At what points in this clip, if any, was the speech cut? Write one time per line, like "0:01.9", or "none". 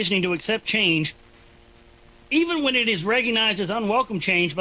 0:03.0

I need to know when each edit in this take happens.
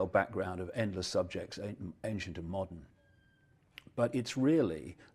0:02.2

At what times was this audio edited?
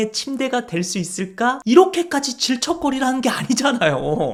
none

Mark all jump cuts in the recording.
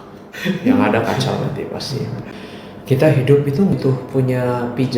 0:02.3
0:03.7

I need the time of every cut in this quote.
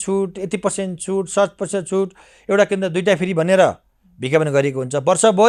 none

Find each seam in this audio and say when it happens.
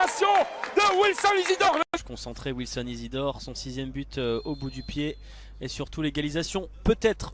0:01.9

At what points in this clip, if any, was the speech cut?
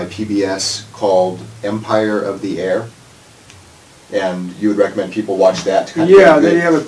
none

